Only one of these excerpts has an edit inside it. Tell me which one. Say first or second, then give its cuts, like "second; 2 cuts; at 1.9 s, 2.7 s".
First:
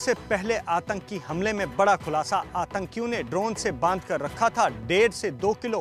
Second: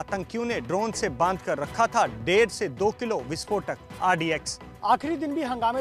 second; 1 cut; at 4.6 s